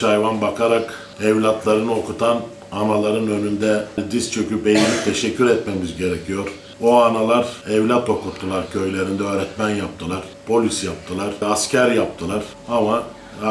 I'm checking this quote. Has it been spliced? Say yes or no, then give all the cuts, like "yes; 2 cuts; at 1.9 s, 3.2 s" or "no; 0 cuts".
yes; 3 cuts; at 6.6 s, 7.6 s, 10.3 s